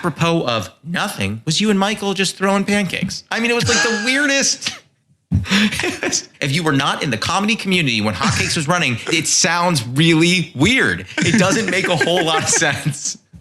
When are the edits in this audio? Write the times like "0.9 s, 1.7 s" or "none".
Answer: 6.3 s, 9.0 s